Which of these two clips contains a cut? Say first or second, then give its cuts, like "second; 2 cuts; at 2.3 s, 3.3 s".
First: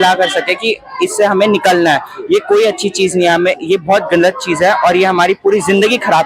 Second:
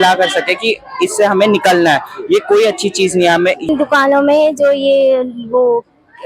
second; 1 cut; at 3.7 s